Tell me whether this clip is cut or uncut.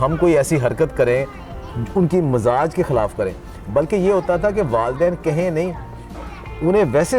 uncut